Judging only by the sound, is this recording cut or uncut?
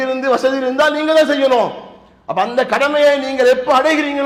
uncut